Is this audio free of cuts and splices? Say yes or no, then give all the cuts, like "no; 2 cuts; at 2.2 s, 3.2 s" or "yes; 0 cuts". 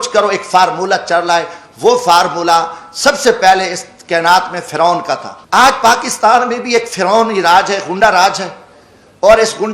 no; 1 cut; at 5.3 s